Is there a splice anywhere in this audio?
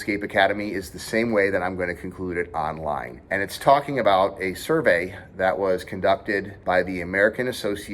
yes; 2 cuts; at 3.1 s, 6.5 s

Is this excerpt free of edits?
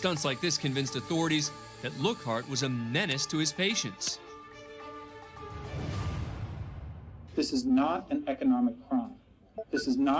yes; 0 cuts

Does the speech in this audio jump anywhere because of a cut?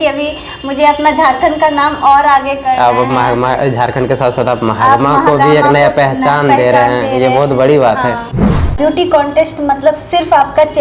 yes; 1 cut; at 8.7 s

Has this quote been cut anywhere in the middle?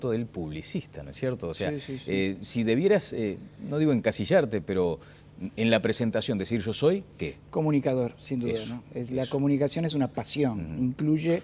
yes; 1 cut; at 8.5 s

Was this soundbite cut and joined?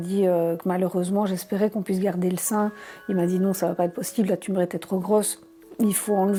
no; 0 cuts

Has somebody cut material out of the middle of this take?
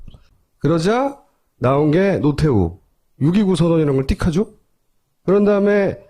yes; 1 cut; at 2.0 s

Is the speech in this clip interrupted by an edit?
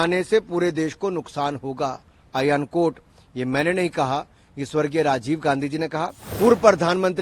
yes; 1 cut; at 6.2 s

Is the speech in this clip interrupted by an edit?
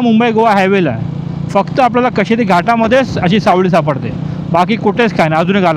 no; 0 cuts

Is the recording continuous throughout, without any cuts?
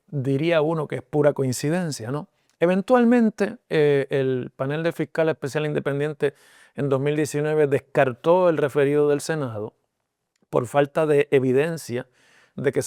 yes; 0 cuts

